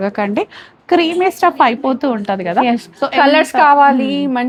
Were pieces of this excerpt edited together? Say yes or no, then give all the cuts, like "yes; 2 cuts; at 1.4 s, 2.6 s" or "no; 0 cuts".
no; 0 cuts